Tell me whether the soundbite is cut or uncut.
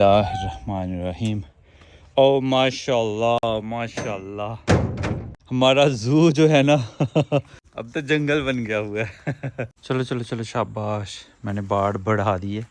cut